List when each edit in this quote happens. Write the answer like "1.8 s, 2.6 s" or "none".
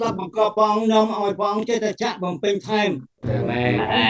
3.1 s